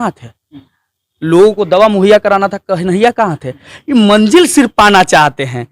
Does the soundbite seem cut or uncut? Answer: uncut